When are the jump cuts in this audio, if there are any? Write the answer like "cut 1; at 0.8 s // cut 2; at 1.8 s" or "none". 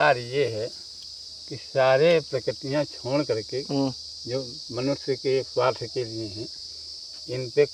none

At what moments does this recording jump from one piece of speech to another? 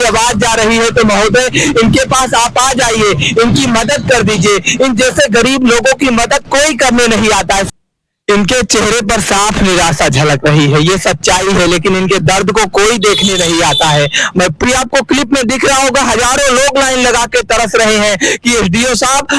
cut 1; at 7.7 s // cut 2; at 14.6 s

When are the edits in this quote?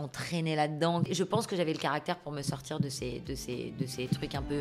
cut 1; at 1.1 s

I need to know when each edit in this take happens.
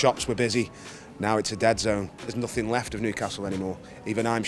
cut 1; at 2.3 s

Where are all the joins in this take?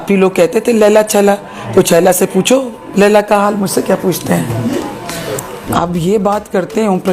cut 1; at 5.6 s

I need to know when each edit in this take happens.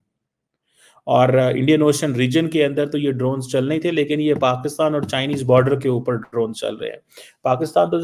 none

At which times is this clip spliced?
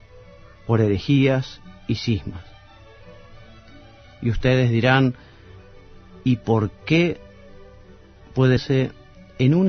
none

